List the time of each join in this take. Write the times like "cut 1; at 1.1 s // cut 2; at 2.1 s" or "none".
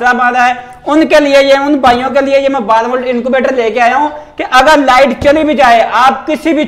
none